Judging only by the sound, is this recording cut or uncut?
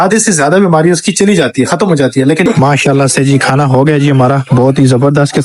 cut